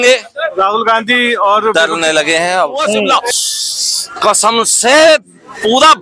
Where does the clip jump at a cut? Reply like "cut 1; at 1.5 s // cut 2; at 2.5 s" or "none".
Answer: cut 1; at 3.1 s

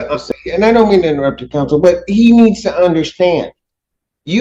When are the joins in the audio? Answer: none

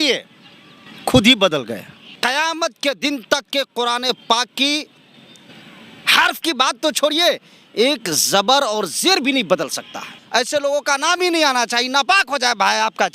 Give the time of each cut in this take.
cut 1; at 2.2 s // cut 2; at 10.2 s

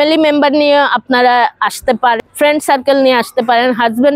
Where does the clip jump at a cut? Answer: cut 1; at 2.2 s

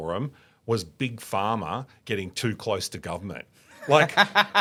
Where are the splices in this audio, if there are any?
none

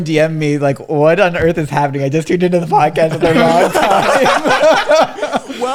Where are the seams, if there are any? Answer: none

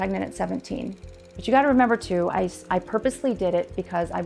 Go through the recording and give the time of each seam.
none

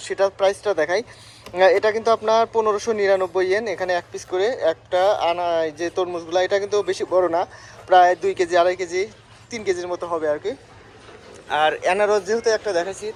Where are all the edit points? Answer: none

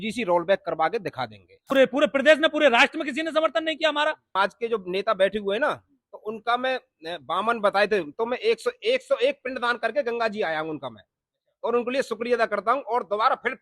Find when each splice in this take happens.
cut 1; at 1.6 s // cut 2; at 4.3 s

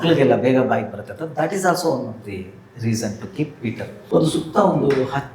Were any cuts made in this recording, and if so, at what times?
cut 1; at 4.0 s

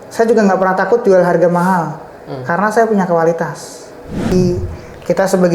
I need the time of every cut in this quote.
cut 1; at 4.3 s

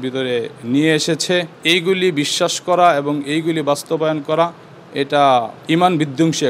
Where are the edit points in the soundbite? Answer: cut 1; at 1.5 s // cut 2; at 5.6 s

